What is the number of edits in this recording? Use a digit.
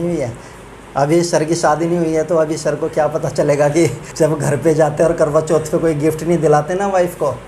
1